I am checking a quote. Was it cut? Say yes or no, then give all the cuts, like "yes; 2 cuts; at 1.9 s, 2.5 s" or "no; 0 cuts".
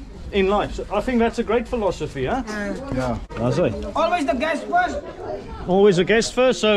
yes; 1 cut; at 3.3 s